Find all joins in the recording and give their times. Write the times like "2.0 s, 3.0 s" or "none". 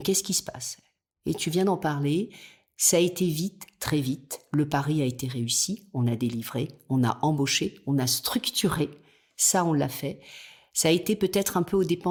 none